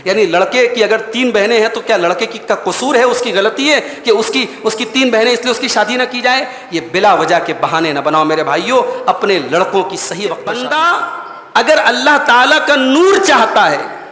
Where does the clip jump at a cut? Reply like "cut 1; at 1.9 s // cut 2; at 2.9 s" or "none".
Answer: cut 1; at 10.5 s